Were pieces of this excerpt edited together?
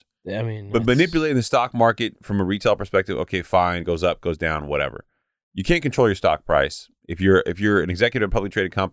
no; 0 cuts

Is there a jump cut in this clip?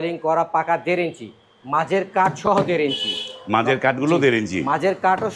no; 0 cuts

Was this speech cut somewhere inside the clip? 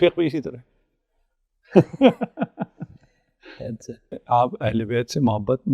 yes; 1 cut; at 4.1 s

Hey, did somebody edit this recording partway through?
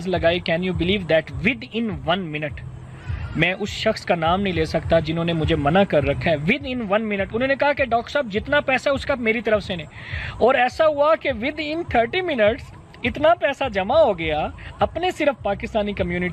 no; 0 cuts

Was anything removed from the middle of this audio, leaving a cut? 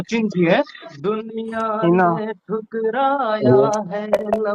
yes; 1 cut; at 0.9 s

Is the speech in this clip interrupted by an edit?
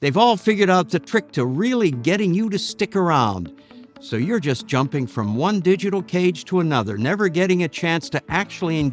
no; 0 cuts

